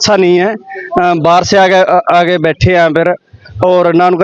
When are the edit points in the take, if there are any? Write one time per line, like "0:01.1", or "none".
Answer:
none